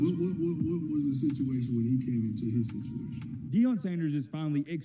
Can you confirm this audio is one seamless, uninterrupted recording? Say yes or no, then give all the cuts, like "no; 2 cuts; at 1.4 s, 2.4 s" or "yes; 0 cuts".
no; 1 cut; at 3.4 s